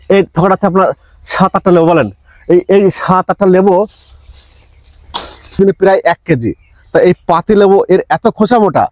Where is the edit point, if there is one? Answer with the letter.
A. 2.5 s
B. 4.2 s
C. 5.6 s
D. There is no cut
C